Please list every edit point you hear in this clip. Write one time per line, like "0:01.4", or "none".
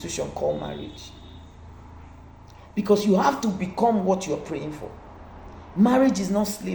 none